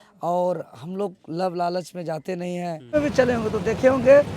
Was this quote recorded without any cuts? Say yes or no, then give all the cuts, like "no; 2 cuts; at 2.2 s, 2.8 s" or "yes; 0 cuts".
no; 1 cut; at 2.9 s